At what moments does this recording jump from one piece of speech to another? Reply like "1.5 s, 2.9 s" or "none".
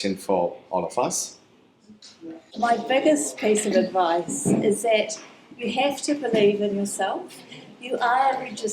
2.5 s